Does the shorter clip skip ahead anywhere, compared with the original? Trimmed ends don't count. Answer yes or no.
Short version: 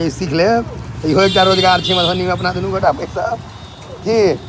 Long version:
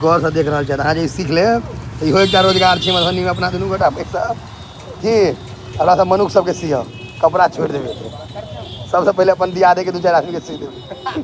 no